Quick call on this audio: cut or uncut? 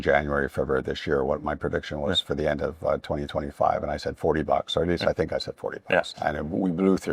uncut